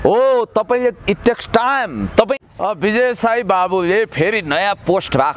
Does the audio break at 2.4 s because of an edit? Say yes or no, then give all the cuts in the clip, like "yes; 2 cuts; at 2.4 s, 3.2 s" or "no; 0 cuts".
yes; 1 cut; at 2.4 s